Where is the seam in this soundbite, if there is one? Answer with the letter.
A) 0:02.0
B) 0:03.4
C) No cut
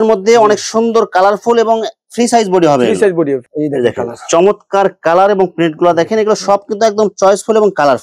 B